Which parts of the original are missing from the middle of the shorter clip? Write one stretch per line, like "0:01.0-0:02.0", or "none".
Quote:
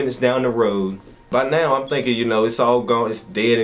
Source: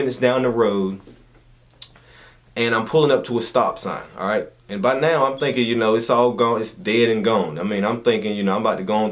0:01.1-0:04.6